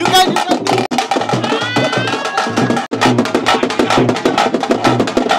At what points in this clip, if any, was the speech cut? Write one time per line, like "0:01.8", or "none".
0:00.9
0:02.9